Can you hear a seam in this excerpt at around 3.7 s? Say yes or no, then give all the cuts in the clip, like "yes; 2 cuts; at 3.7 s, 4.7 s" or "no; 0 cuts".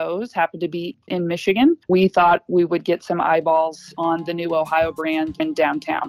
no; 3 cuts; at 1.0 s, 1.8 s, 5.4 s